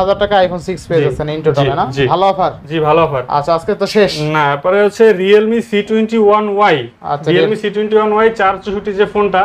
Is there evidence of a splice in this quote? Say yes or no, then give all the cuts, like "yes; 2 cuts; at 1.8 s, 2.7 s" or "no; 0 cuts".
no; 0 cuts